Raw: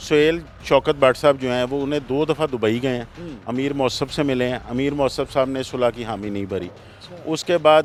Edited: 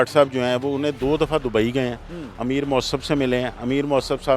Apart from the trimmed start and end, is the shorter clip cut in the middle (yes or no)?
no